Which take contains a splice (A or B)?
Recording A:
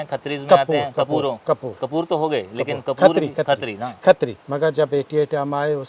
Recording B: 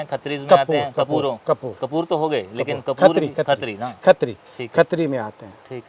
A